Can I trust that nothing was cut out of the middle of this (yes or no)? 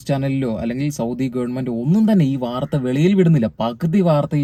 yes